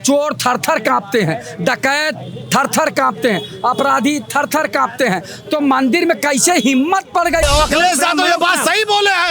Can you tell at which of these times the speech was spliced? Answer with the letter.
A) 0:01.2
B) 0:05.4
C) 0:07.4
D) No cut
C